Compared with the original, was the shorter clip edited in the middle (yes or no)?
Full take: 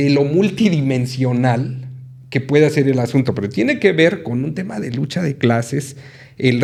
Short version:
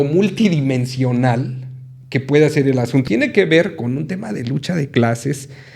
yes